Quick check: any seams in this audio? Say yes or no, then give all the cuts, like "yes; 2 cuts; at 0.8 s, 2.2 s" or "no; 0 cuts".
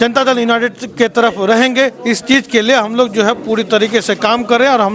no; 0 cuts